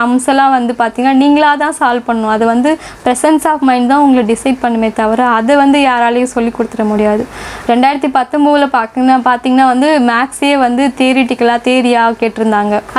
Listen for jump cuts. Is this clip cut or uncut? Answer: uncut